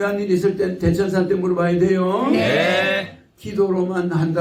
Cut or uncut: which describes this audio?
uncut